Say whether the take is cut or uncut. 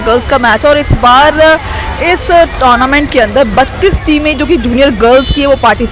uncut